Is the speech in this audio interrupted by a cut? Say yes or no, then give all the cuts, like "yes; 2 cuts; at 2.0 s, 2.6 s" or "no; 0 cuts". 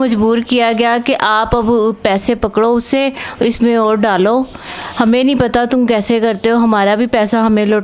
no; 0 cuts